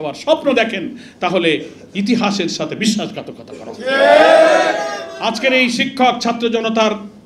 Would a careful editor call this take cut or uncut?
uncut